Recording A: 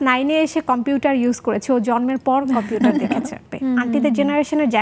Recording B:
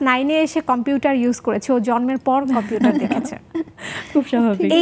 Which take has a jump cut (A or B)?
A